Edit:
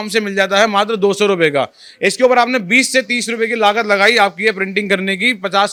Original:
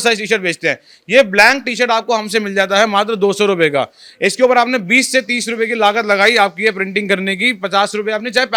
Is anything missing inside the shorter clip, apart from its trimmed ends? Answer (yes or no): no